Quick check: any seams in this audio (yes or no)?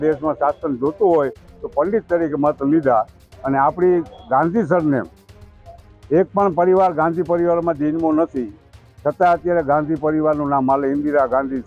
no